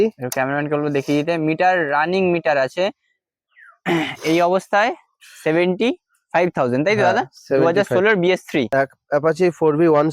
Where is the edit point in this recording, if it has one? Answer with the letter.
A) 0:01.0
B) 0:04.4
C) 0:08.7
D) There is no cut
C